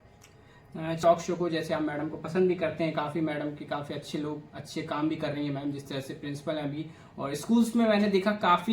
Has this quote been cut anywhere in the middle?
yes; 1 cut; at 1.0 s

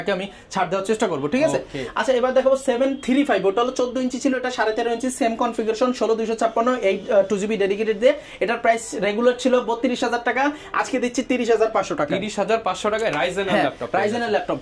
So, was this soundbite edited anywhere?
no; 0 cuts

